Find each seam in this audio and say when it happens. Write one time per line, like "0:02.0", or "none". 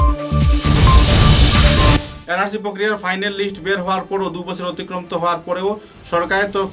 0:02.1

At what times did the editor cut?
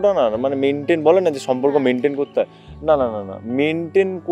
none

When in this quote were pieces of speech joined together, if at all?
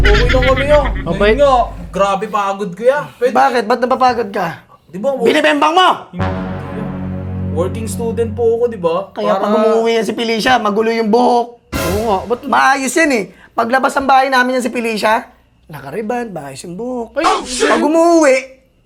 none

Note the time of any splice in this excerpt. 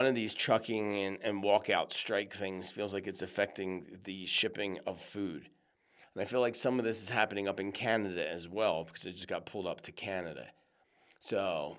none

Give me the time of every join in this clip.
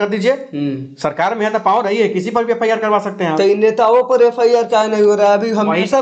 none

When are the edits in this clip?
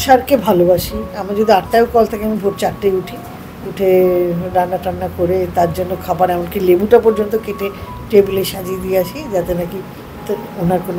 0:01.2

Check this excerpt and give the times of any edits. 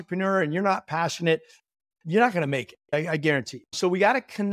0:02.9
0:03.6

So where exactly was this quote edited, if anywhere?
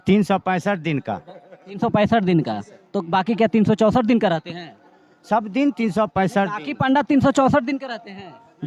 none

